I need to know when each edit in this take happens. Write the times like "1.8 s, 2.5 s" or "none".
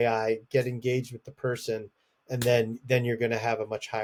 none